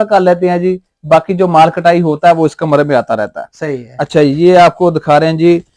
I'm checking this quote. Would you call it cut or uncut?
uncut